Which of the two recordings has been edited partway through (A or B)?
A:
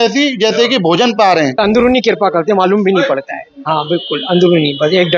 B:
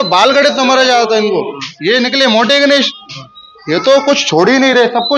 A